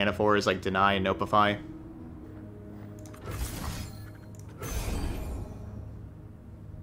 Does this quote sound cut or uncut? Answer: uncut